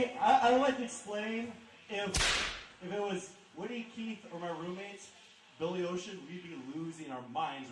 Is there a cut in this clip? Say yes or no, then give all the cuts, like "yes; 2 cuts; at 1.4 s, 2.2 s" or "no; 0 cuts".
no; 0 cuts